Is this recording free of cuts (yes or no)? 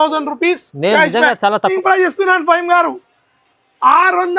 no